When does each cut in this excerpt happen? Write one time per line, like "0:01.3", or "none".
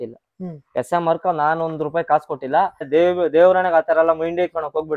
0:02.9